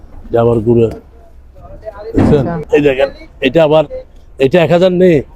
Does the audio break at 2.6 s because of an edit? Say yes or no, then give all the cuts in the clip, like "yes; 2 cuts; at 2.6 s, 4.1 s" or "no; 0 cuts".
yes; 1 cut; at 2.6 s